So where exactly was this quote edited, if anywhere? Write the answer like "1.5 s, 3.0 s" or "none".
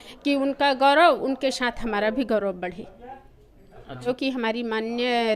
4.1 s